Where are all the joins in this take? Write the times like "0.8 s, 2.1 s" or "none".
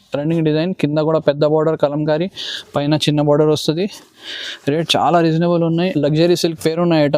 5.9 s